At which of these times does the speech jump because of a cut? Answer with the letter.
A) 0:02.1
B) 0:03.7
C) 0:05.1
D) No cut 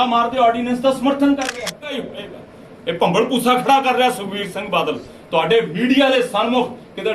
A